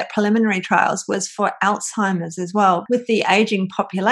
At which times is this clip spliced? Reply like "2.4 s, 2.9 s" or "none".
2.8 s